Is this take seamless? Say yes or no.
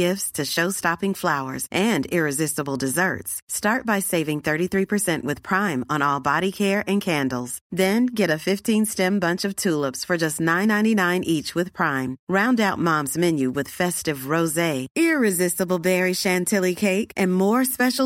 yes